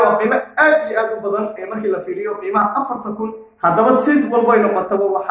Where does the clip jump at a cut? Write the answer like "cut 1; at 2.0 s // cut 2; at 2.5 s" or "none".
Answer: none